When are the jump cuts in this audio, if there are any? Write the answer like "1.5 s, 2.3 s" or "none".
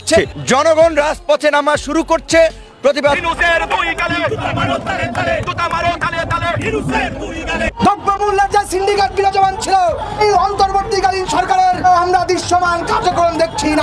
3.2 s